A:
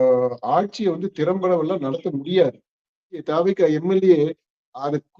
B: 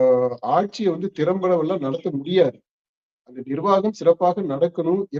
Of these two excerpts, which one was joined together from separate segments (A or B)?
A